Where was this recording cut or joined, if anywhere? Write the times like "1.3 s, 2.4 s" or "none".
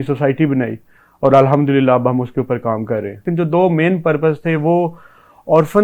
3.2 s